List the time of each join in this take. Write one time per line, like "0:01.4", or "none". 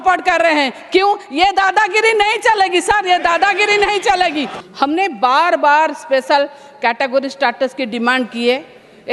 0:04.6

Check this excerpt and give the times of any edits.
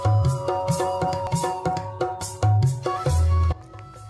0:01.3

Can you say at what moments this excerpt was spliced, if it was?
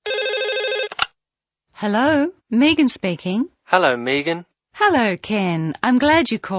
0:01.2

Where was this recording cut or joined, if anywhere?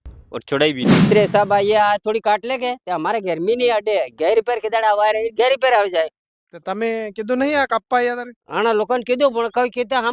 0:01.1

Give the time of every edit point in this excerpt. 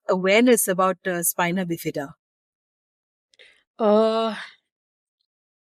none

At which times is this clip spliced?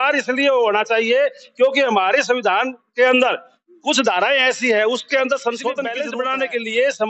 0:06.0

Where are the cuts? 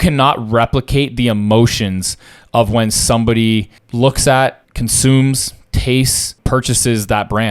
0:03.8
0:04.7
0:06.4

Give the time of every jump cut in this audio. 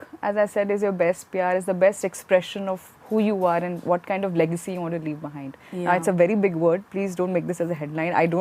none

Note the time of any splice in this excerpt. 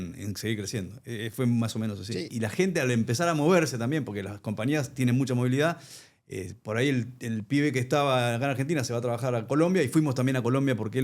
0:02.3

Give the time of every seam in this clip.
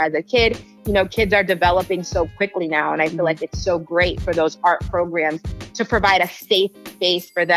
none

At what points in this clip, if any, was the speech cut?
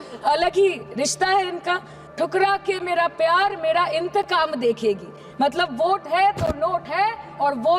0:01.9

